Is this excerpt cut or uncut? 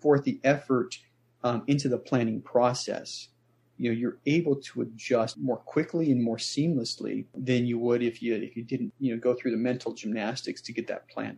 cut